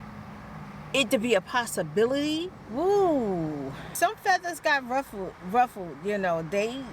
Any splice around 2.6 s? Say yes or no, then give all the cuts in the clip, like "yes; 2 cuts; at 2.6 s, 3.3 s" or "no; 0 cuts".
yes; 2 cuts; at 2.6 s, 3.9 s